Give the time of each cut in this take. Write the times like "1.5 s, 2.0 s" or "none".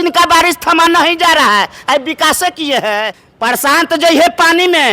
3.2 s